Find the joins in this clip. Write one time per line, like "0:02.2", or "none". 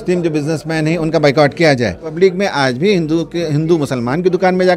0:02.1